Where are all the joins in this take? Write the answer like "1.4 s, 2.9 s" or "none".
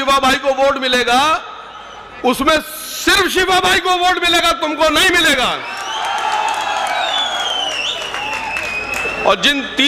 none